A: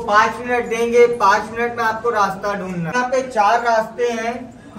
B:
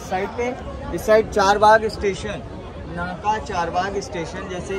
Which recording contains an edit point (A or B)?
A